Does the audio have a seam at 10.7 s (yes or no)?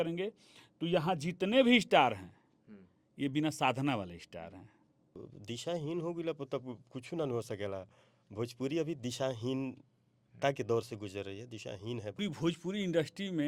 no